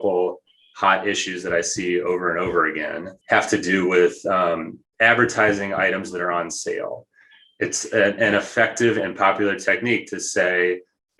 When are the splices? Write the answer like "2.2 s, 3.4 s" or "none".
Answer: 3.1 s, 4.8 s